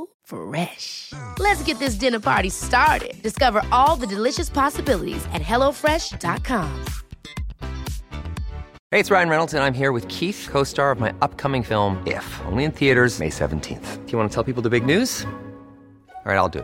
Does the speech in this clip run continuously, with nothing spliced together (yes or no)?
no